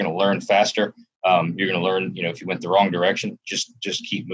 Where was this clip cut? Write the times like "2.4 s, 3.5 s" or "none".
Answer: none